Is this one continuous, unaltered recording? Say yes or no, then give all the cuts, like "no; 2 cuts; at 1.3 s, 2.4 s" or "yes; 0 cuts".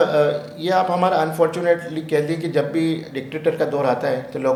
yes; 0 cuts